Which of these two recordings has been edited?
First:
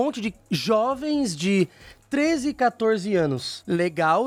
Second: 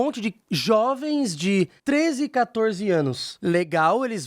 second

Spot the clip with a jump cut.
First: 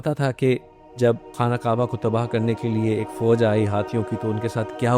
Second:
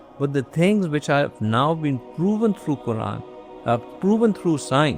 first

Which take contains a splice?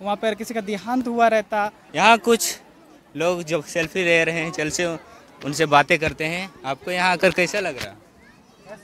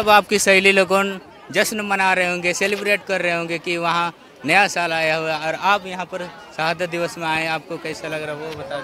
first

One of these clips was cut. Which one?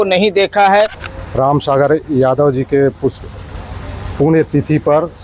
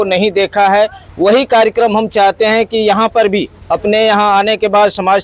first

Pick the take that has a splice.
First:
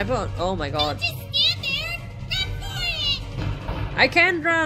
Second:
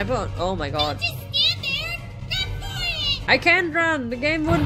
second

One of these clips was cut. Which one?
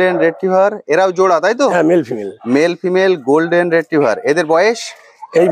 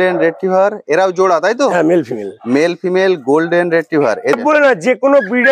second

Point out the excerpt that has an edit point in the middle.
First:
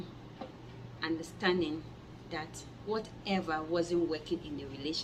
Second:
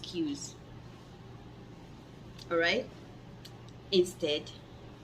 second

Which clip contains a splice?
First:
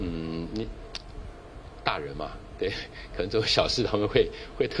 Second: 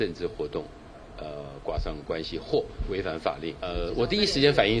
second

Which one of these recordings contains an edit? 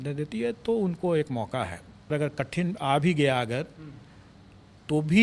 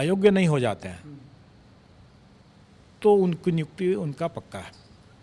first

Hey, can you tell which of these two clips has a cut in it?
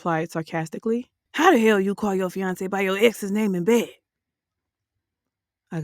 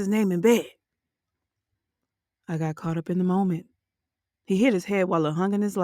first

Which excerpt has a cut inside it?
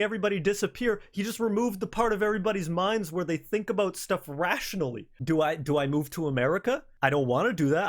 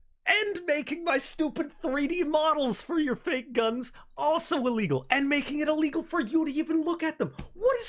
first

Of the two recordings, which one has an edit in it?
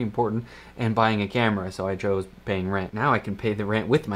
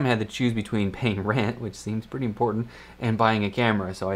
first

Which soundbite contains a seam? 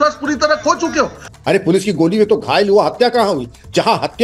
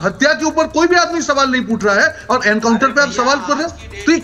first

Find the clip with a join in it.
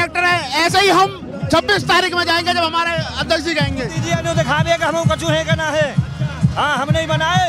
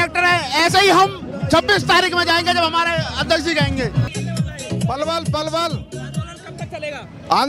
first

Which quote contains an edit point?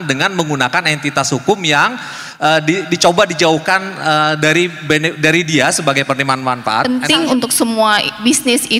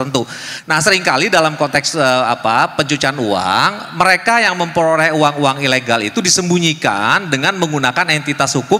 first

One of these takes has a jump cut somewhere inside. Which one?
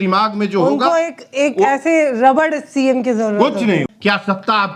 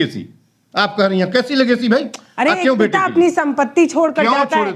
first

